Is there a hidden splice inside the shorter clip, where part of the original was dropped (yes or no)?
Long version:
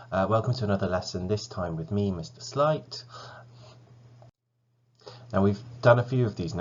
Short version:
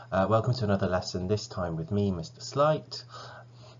no